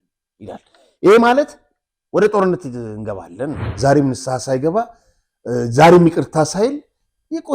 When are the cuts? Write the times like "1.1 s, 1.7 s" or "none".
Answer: 3.6 s